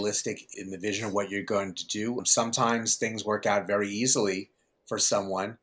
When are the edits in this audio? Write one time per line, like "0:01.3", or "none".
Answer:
none